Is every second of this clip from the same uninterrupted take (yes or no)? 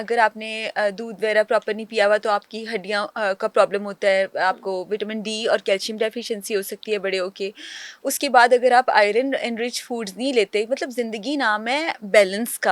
yes